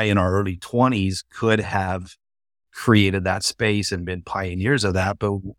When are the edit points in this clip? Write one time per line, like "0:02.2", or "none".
none